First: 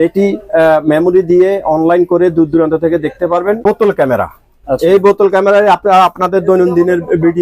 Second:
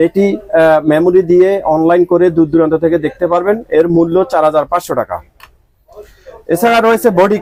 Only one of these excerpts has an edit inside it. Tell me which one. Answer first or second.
first